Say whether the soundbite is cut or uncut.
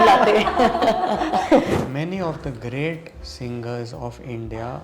cut